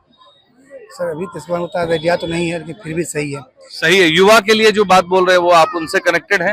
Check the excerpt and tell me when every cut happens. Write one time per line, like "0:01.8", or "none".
none